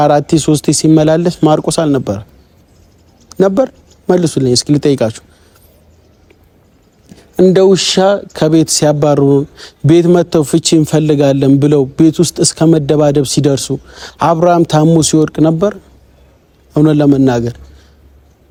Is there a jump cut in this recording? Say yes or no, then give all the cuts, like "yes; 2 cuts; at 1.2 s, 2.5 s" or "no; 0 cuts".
no; 0 cuts